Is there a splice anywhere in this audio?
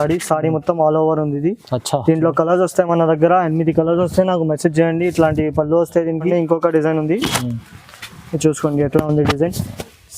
yes; 1 cut; at 6.3 s

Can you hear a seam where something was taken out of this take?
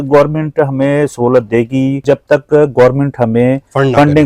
yes; 1 cut; at 2.0 s

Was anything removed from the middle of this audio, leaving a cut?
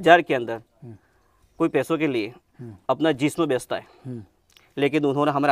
no; 0 cuts

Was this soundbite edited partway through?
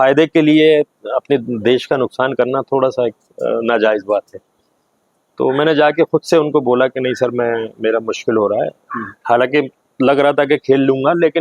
no; 0 cuts

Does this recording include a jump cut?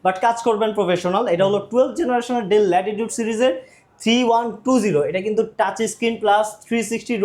no; 0 cuts

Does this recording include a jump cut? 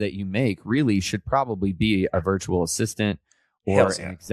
no; 0 cuts

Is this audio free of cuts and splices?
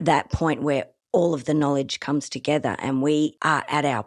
yes; 0 cuts

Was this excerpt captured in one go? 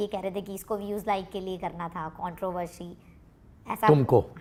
yes; 0 cuts

